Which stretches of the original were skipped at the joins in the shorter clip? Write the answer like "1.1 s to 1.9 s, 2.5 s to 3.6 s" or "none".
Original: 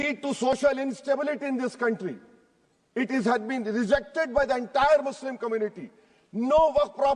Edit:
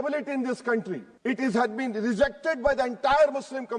2.2 s to 2.8 s